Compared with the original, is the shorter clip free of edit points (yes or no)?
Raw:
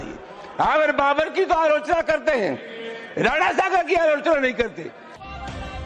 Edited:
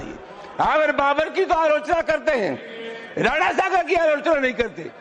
yes